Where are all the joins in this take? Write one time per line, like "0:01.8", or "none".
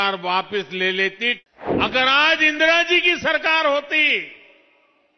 0:01.4